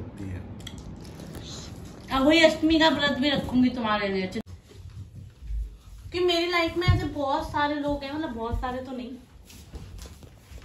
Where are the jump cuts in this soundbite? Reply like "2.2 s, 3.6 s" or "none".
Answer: 4.4 s